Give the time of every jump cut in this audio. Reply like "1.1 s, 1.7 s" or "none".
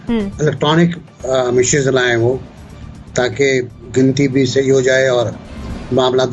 none